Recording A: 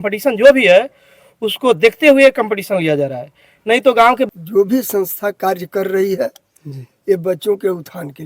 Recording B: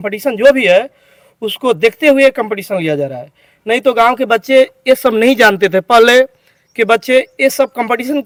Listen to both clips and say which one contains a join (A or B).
A